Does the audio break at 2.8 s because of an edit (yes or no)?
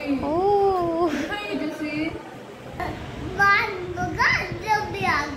yes